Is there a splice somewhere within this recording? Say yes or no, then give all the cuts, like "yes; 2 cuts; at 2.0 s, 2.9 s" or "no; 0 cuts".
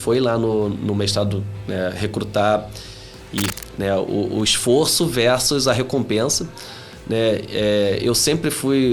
yes; 1 cut; at 3.6 s